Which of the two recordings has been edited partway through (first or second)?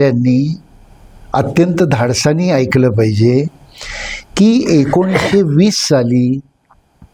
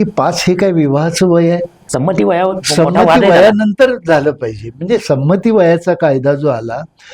second